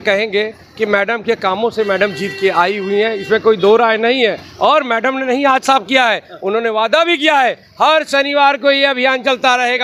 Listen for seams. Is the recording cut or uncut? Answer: uncut